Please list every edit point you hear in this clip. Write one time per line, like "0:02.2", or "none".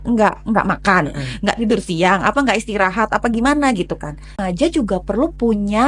0:04.4